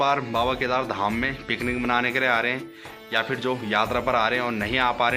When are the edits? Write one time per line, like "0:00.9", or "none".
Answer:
none